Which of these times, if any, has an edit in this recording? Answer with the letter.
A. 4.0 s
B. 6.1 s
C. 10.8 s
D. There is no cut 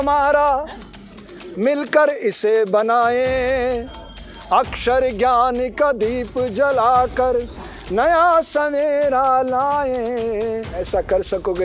C